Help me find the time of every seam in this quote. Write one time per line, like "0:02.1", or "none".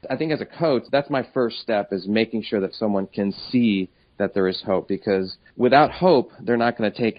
none